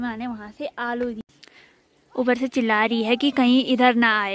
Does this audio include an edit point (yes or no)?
yes